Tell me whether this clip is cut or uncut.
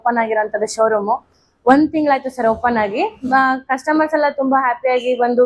uncut